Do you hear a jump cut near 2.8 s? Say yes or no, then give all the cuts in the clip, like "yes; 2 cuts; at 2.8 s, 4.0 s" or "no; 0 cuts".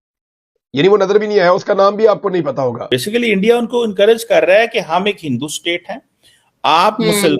yes; 1 cut; at 2.8 s